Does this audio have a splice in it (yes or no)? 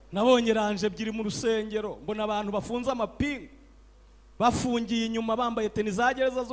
no